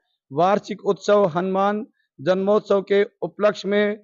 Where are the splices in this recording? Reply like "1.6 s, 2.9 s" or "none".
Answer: none